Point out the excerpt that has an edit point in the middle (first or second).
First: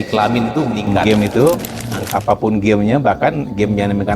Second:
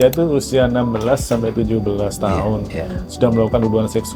first